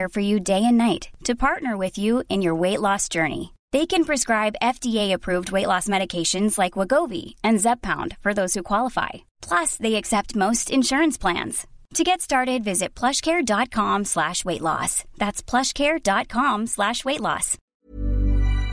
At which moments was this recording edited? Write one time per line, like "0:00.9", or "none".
0:17.6